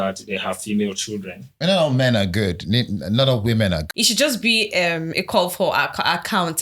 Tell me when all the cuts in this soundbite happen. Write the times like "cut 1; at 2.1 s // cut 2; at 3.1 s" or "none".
cut 1; at 1.5 s // cut 2; at 3.8 s